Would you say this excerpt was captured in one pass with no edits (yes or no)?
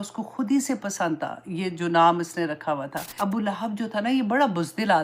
no